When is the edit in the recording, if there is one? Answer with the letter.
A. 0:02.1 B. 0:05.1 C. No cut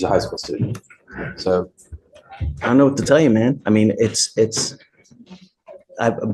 C